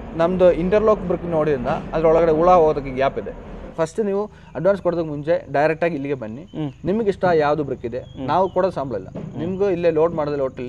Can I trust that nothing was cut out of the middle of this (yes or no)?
no